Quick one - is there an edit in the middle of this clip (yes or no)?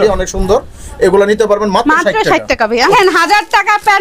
yes